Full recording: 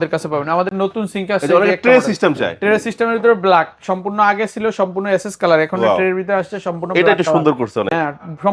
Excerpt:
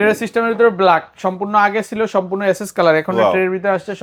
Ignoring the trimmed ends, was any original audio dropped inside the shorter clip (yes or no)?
no